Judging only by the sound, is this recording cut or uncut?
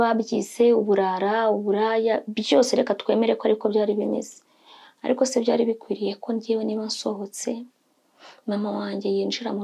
uncut